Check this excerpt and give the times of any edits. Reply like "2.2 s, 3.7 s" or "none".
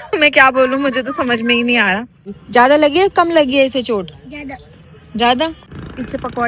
2.3 s, 5.7 s